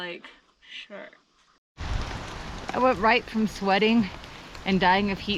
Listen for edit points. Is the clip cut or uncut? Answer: cut